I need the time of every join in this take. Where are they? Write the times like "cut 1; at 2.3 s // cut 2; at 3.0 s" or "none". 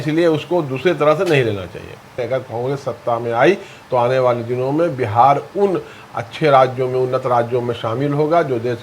cut 1; at 2.2 s